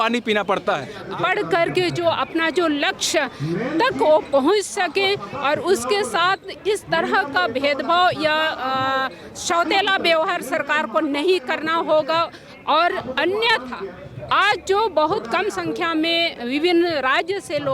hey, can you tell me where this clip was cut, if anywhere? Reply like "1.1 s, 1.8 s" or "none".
0.9 s

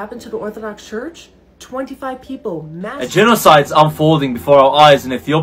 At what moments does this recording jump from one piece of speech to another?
3.0 s

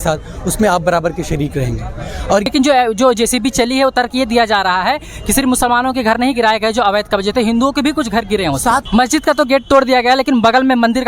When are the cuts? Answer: 2.5 s, 8.8 s

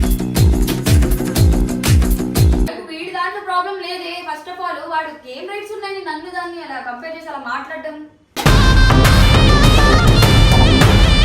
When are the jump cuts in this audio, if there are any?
2.7 s

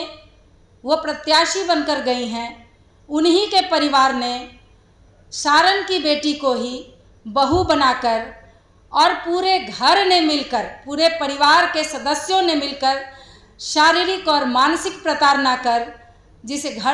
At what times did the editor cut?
none

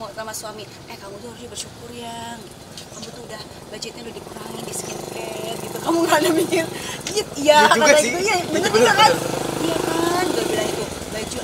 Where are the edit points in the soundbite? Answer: none

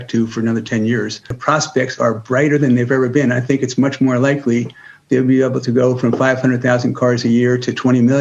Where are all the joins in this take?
1.4 s

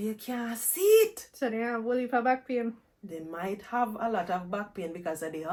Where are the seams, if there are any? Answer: none

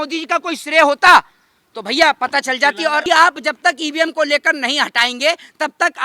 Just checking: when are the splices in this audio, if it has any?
3.0 s

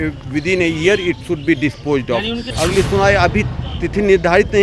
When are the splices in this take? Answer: 2.5 s

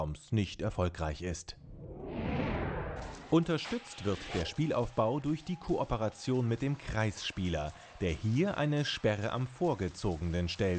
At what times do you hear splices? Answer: 2.9 s

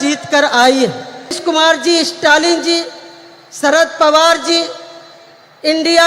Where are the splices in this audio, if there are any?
1.4 s

